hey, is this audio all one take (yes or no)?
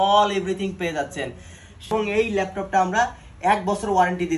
no